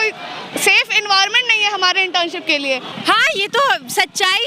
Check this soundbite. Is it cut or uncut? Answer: cut